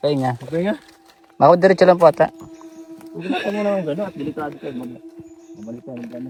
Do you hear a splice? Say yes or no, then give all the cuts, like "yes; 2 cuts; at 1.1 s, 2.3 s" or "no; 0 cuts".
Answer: no; 0 cuts